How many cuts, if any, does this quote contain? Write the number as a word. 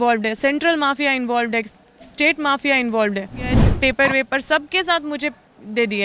one